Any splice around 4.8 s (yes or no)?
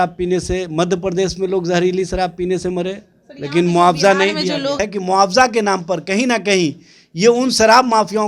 yes